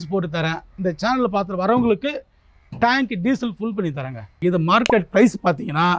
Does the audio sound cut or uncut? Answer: cut